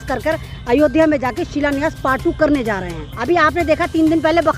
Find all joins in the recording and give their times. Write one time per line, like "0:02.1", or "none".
0:03.0